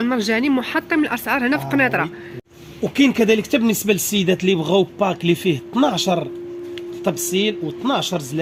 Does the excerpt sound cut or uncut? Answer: uncut